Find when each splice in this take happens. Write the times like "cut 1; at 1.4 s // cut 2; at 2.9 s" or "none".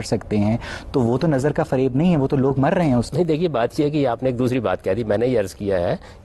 none